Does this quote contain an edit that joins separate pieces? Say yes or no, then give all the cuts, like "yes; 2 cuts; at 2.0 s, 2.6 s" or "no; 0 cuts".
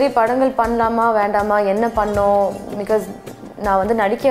no; 0 cuts